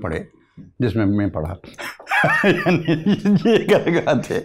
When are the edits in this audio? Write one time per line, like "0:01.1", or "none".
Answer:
none